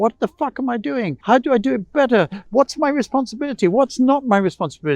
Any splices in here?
yes; 2 cuts; at 1.2 s, 2.4 s

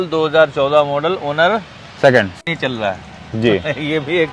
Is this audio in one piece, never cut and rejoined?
no; 1 cut; at 2.4 s

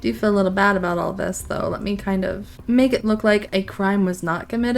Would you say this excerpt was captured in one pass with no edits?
no; 1 cut; at 2.5 s

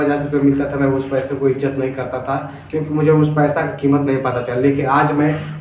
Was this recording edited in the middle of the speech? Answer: no; 0 cuts

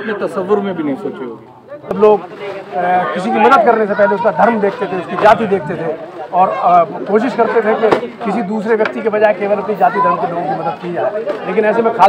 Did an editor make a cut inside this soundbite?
yes; 1 cut; at 2.0 s

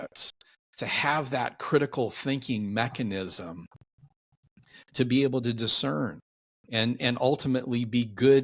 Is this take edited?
no; 0 cuts

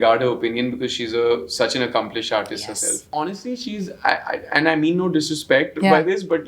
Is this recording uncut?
no; 1 cut; at 3.1 s

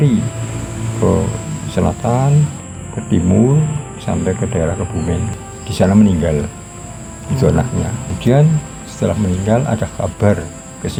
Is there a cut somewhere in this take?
no; 0 cuts

